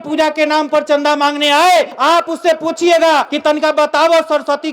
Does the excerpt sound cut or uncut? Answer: cut